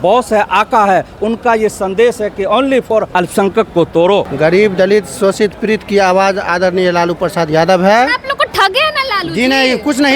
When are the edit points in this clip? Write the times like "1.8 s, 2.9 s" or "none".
3.1 s, 4.3 s